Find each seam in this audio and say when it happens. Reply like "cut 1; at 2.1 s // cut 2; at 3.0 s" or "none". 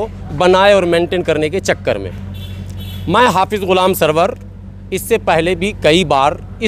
none